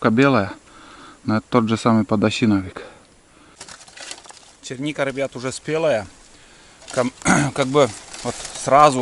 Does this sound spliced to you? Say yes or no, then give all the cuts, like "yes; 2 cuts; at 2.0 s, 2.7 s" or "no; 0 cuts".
yes; 1 cut; at 3.6 s